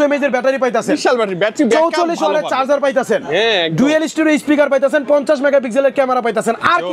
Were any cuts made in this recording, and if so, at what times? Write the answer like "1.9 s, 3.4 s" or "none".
none